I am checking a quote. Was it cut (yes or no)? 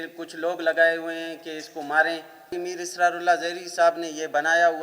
yes